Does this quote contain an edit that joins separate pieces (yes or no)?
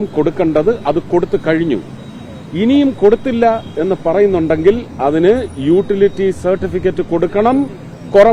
no